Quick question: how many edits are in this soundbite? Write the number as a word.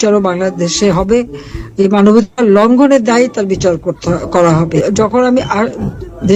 one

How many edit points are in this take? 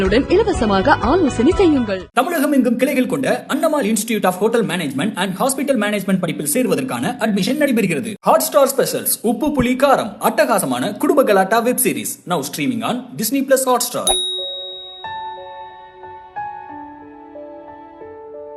zero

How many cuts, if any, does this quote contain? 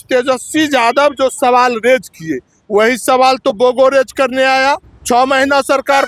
one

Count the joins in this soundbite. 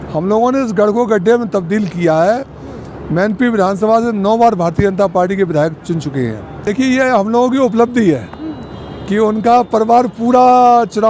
one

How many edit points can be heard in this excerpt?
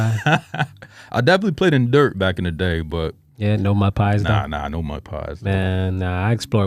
zero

